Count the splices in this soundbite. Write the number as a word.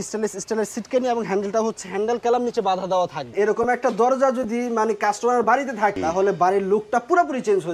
two